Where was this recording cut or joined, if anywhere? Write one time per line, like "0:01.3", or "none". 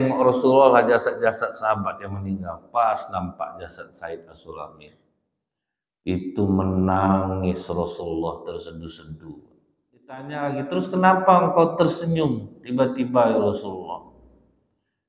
0:10.3